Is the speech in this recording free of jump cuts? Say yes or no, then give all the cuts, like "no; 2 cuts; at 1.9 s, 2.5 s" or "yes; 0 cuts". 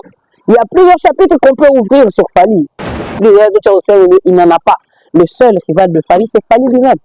no; 1 cut; at 3.1 s